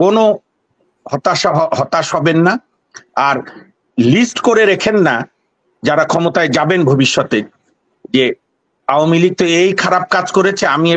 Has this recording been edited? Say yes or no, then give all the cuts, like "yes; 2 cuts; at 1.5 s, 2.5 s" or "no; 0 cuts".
no; 0 cuts